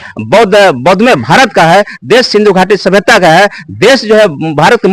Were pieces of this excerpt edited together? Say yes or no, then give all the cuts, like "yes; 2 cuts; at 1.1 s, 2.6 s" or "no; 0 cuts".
no; 0 cuts